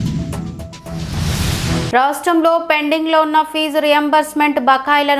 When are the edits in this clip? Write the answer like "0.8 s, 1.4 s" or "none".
1.9 s

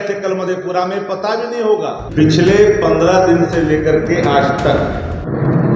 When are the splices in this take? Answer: 2.0 s

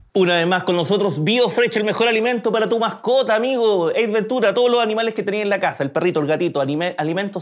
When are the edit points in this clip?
none

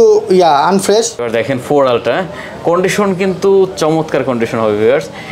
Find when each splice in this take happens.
1.2 s

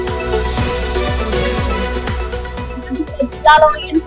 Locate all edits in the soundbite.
2.6 s

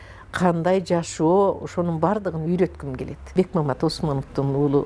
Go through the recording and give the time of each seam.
3.3 s

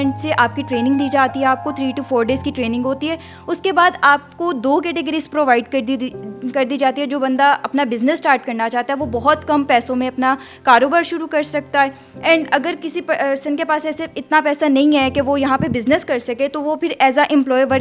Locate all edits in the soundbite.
none

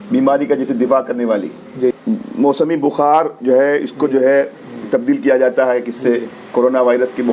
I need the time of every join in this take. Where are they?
2.0 s

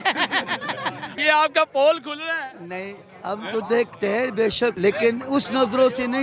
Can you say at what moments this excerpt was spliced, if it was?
1.1 s, 4.8 s

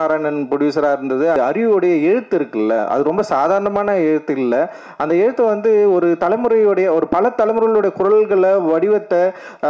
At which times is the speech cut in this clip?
1.4 s

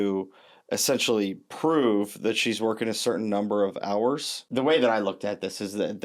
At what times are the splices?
4.3 s

